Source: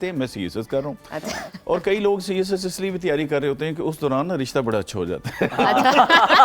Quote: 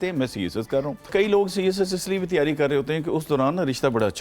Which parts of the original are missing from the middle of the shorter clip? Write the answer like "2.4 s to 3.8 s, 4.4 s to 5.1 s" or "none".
1.1 s to 1.8 s

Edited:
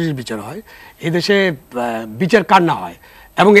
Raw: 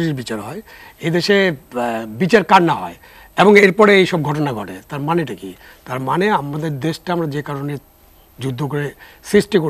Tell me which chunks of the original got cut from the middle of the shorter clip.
none

